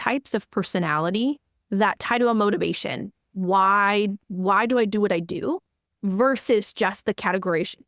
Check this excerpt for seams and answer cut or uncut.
uncut